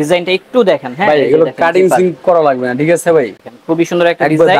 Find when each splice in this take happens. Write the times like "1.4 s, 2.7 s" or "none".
3.5 s